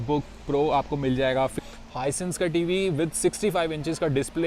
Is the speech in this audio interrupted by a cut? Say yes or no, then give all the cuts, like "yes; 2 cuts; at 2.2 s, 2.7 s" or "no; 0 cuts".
yes; 1 cut; at 1.6 s